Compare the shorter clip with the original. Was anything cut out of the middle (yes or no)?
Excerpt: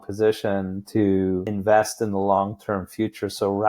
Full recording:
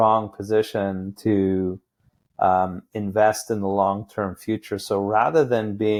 yes